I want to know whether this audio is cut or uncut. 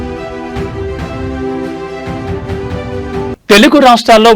uncut